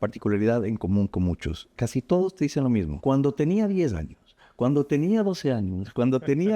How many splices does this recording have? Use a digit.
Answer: 1